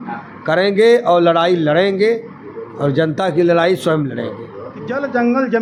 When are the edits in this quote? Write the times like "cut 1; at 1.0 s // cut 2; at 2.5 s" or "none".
none

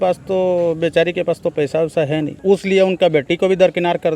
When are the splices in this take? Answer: cut 1; at 2.3 s

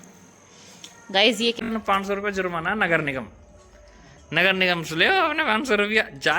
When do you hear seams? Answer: cut 1; at 1.6 s

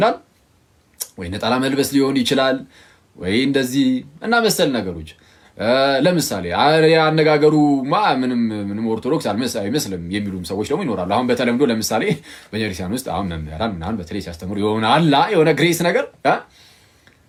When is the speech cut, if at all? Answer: none

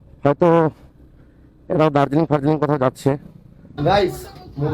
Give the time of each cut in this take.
cut 1; at 3.7 s

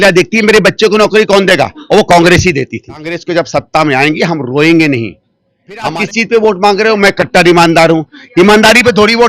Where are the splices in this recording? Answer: cut 1; at 3.2 s // cut 2; at 5.9 s

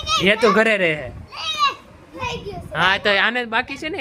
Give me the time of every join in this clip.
cut 1; at 2.2 s

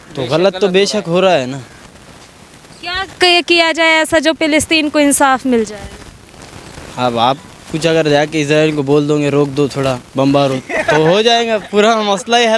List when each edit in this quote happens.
none

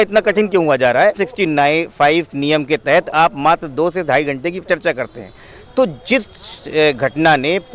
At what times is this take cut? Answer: cut 1; at 1.2 s

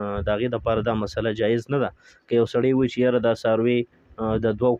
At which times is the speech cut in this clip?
none

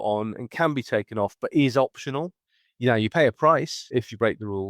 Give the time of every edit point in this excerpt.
cut 1; at 3.8 s

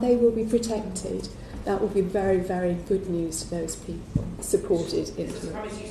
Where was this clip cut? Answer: cut 1; at 4.4 s

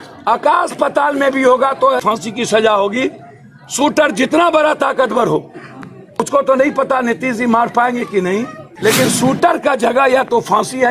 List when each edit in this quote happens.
cut 1; at 2.0 s // cut 2; at 6.2 s // cut 3; at 8.6 s

